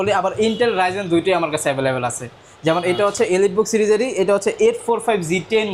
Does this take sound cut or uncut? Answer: uncut